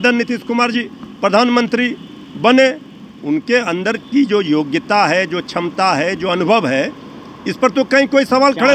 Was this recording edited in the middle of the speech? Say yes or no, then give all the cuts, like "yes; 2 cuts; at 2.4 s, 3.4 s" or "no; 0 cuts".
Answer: no; 0 cuts